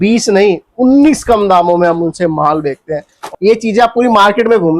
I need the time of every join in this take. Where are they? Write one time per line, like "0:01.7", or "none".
0:03.1